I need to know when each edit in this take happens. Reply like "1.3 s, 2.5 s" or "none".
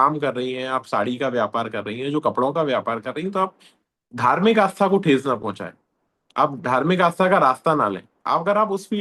none